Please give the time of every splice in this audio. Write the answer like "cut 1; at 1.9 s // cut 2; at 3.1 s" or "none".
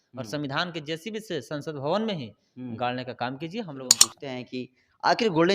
cut 1; at 4.1 s